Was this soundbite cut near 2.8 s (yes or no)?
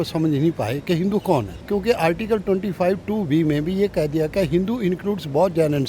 no